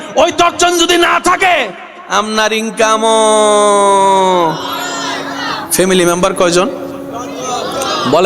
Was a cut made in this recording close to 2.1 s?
no; 1 cut; at 5.6 s

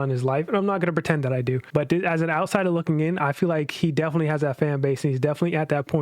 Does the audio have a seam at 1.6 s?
yes; 1 cut; at 1.6 s

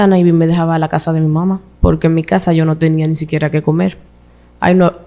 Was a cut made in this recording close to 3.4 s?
no; 1 cut; at 1.7 s

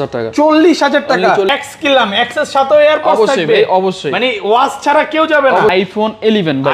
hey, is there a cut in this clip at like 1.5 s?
yes; 2 cuts; at 1.5 s, 5.7 s

